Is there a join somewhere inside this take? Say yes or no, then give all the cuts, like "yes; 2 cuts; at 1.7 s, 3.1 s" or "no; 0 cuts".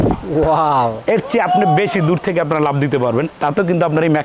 no; 0 cuts